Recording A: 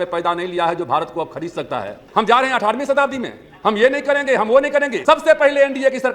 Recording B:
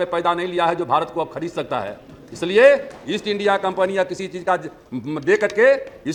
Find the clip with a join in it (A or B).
A